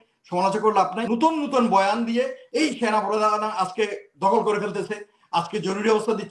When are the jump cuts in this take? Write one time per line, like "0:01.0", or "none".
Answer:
0:01.0

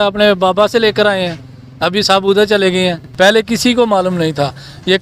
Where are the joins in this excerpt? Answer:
0:03.0

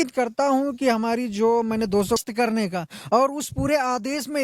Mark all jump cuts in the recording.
0:02.2

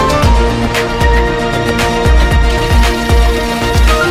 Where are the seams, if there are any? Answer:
none

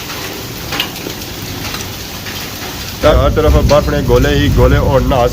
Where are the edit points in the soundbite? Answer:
0:03.1

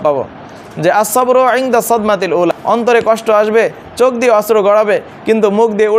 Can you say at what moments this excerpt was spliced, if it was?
0:02.6

